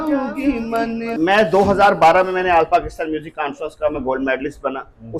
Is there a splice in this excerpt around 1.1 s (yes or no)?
yes